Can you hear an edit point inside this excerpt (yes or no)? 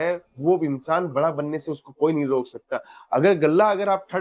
no